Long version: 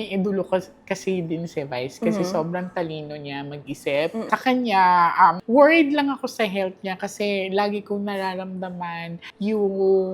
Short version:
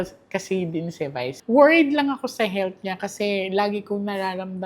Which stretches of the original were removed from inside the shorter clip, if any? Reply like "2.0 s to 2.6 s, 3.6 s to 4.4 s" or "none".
2.0 s to 5.4 s